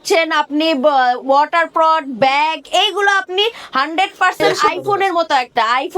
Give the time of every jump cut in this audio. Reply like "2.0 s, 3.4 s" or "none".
4.4 s